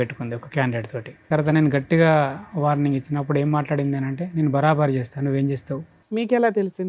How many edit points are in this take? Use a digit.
2